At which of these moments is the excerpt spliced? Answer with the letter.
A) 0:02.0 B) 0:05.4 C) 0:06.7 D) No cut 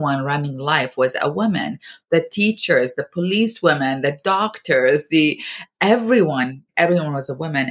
C